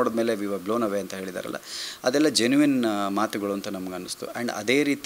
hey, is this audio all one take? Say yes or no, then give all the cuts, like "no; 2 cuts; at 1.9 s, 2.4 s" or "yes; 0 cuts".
yes; 0 cuts